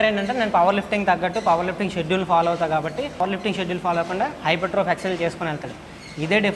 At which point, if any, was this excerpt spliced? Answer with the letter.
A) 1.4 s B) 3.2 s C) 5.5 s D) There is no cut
B